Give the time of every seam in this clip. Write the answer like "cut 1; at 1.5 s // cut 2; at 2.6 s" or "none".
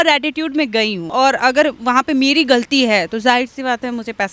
cut 1; at 1.1 s